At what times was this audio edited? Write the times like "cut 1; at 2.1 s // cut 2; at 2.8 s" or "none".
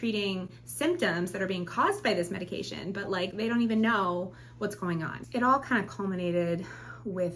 cut 1; at 5.2 s